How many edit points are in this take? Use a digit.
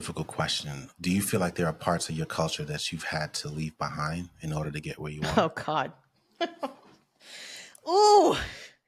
1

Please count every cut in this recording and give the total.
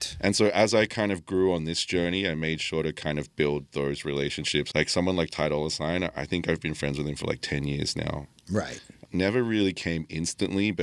2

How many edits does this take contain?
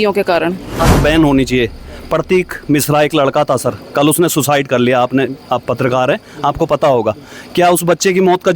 1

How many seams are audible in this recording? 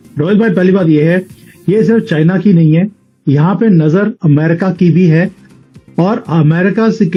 0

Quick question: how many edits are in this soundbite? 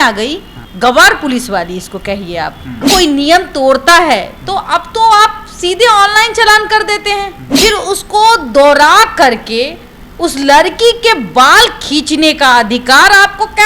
2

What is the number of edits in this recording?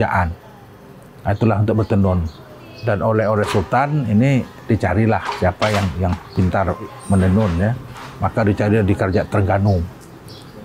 1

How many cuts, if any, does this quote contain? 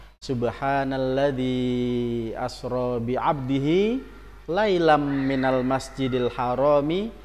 0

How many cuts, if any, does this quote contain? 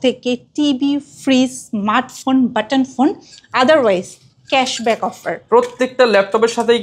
0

